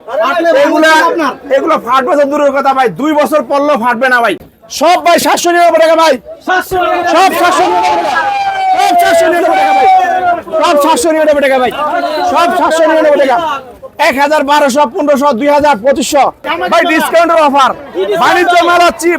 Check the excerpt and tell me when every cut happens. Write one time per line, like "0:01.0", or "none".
0:04.5
0:16.4